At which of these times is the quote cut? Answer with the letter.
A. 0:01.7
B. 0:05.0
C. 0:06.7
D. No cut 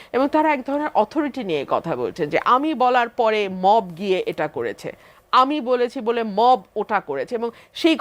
D